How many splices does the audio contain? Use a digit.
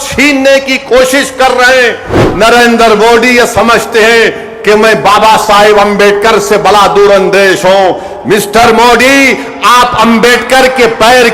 1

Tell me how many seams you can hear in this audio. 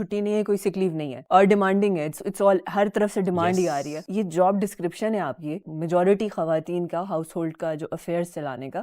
1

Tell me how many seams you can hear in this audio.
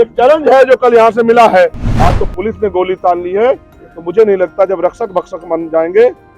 1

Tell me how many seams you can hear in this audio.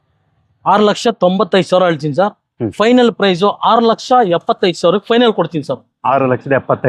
0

